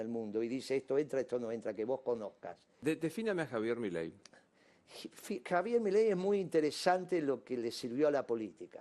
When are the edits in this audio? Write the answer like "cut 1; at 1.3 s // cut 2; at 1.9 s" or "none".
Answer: cut 1; at 2.7 s